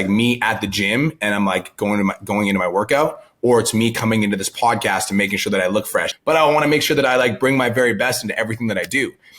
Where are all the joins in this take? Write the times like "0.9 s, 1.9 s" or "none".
6.1 s